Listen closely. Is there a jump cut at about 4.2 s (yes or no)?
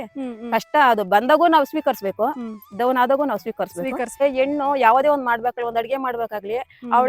yes